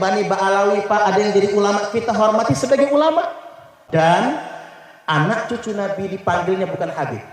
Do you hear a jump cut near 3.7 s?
yes; 1 cut; at 3.7 s

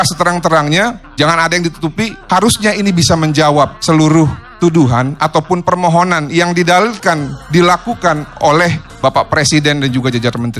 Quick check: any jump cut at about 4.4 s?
yes; 5 cuts; at 1.0 s, 2.2 s, 3.8 s, 4.4 s, 8.9 s

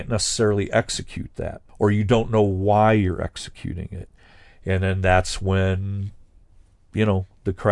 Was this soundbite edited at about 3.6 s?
no; 1 cut; at 1.7 s

